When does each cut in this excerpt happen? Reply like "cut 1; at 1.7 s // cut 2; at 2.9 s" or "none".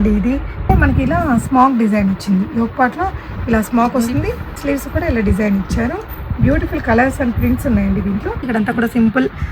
cut 1; at 0.7 s // cut 2; at 4.5 s // cut 3; at 8.4 s